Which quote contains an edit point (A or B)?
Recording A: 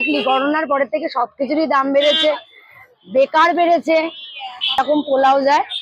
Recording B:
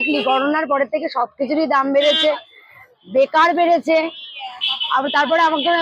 A